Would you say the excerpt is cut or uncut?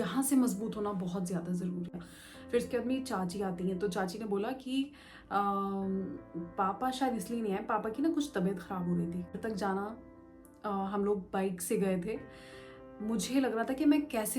cut